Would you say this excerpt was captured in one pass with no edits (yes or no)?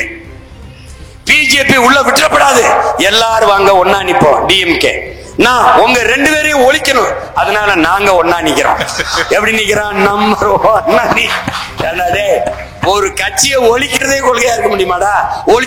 yes